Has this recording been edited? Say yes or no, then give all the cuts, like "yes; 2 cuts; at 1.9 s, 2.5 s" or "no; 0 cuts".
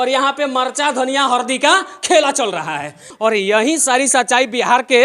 yes; 1 cut; at 3.0 s